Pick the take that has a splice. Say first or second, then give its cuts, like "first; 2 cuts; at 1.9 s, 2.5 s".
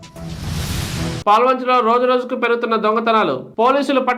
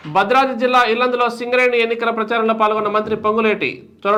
first; 1 cut; at 1.2 s